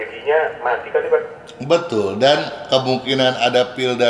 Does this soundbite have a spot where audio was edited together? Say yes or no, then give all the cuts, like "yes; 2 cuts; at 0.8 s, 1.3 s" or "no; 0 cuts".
no; 0 cuts